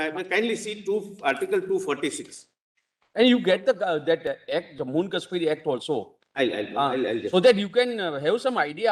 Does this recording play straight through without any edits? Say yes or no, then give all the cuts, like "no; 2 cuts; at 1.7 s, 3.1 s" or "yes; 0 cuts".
yes; 0 cuts